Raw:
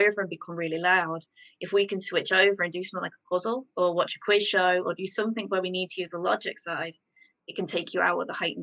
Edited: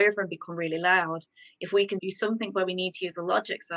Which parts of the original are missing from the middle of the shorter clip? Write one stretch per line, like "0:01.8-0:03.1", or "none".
0:02.0-0:05.0